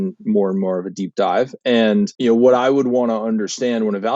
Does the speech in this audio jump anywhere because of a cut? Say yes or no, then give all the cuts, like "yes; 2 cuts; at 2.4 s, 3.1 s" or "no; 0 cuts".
yes; 1 cut; at 2.1 s